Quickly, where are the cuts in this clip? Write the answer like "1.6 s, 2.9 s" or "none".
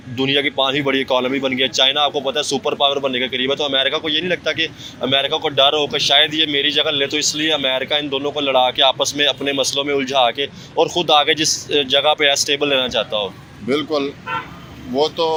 none